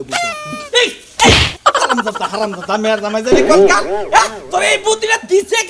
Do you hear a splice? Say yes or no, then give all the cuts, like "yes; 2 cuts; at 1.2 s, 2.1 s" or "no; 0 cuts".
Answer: no; 0 cuts